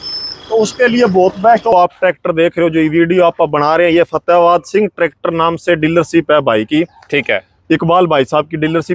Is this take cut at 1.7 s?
yes; 1 cut; at 1.7 s

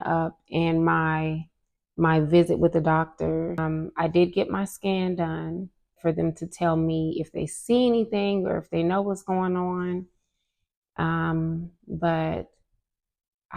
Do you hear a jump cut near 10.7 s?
no; 2 cuts; at 3.6 s, 5.9 s

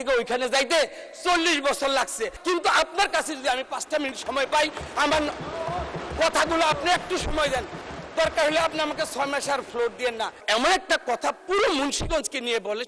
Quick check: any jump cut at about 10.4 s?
yes; 2 cuts; at 2.3 s, 10.4 s

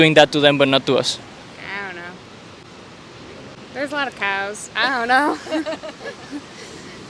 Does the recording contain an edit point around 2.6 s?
no; 0 cuts

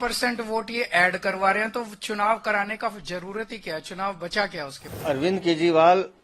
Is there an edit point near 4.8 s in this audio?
yes; 1 cut; at 4.8 s

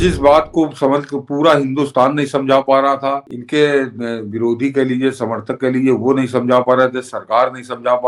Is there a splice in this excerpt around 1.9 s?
no; 1 cut; at 3.3 s

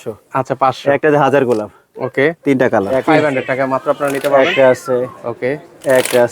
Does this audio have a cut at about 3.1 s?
yes; 1 cut; at 3.1 s

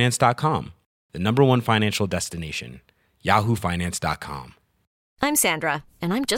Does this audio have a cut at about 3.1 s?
no; 1 cut; at 5.0 s

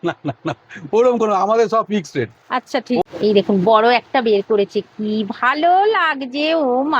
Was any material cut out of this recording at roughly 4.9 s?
no; 1 cut; at 3.0 s

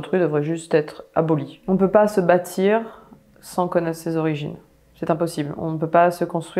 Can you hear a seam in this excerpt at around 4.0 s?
no; 1 cut; at 1.5 s

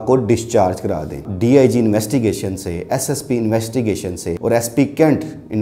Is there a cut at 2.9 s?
no; 2 cuts; at 1.3 s, 4.3 s

